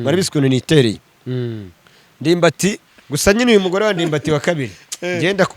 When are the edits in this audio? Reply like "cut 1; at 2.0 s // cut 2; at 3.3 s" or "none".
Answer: cut 1; at 2.9 s